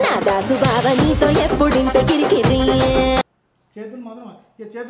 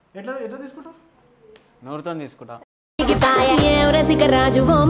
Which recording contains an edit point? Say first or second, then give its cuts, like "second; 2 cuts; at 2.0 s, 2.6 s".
first; 1 cut; at 3.3 s